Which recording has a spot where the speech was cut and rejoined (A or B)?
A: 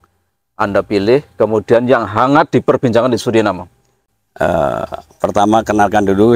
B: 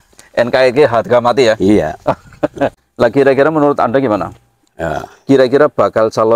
B